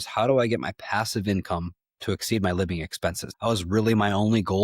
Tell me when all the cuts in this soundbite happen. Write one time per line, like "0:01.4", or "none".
0:03.3